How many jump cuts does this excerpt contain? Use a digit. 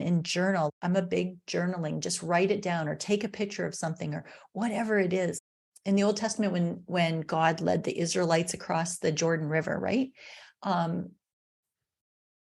0